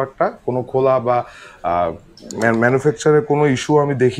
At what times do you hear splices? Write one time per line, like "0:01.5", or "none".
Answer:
none